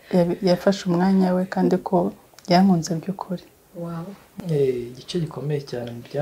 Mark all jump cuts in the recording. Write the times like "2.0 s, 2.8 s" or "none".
4.2 s